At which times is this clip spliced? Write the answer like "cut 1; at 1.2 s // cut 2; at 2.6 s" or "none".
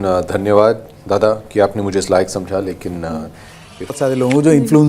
cut 1; at 3.9 s